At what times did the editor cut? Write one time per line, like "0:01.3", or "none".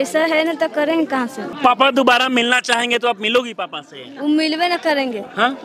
0:01.6